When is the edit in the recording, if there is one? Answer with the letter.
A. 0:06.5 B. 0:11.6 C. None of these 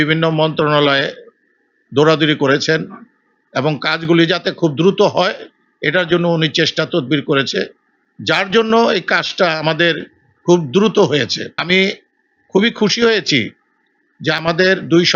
B